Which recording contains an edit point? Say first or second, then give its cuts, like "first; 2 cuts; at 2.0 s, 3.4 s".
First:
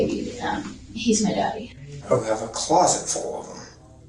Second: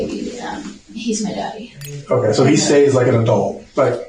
first; 1 cut; at 2.2 s